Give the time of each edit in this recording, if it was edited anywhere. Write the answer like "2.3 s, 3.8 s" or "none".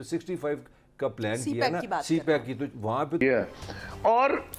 3.2 s

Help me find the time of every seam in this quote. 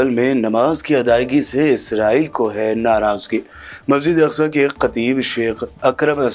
none

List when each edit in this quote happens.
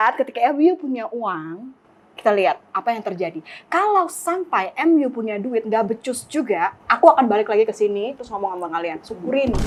none

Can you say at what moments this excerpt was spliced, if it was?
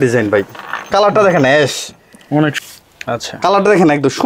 2.6 s

